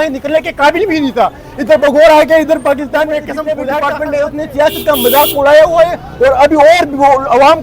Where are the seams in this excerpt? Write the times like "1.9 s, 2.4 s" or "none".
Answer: 3.6 s